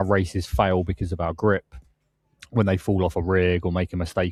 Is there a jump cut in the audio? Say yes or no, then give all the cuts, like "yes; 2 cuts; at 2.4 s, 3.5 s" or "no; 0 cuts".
no; 0 cuts